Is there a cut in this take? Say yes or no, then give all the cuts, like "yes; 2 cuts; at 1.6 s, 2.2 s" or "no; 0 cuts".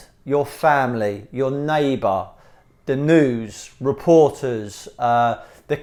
no; 0 cuts